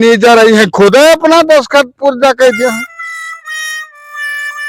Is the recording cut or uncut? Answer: cut